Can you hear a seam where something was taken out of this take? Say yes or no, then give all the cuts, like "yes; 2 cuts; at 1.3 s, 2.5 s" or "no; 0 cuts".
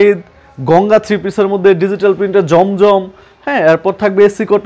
no; 0 cuts